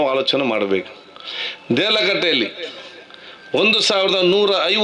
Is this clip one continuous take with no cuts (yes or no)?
yes